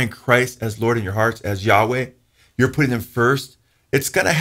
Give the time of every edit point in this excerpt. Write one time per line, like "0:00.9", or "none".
none